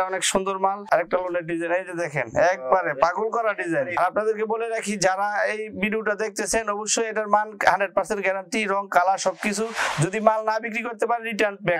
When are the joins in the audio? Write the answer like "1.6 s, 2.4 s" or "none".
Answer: 0.8 s, 4.0 s